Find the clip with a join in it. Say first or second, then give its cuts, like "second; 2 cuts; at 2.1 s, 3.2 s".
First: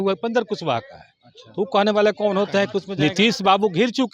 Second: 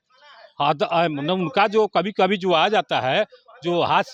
first; 1 cut; at 2.8 s